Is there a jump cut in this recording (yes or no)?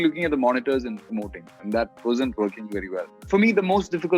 yes